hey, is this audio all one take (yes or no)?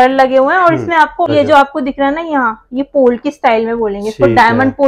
no